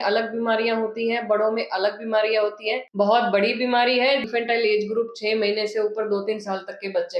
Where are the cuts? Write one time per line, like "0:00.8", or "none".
0:02.8
0:04.3